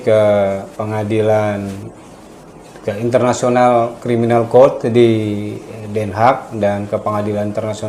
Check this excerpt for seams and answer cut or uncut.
uncut